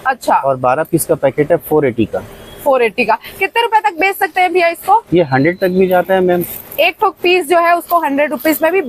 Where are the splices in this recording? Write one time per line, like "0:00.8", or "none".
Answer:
none